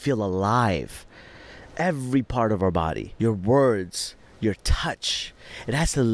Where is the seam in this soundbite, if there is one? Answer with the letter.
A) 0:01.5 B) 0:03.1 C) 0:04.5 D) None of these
B